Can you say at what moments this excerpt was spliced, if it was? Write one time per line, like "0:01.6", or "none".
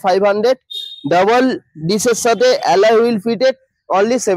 none